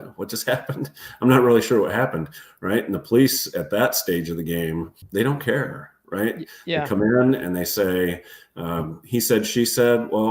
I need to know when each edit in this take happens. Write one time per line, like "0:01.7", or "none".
0:05.0